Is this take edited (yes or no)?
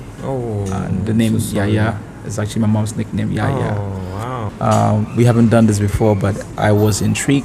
yes